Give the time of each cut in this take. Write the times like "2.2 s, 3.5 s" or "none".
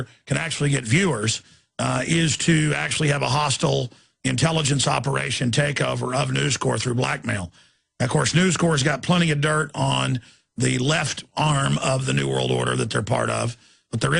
11.1 s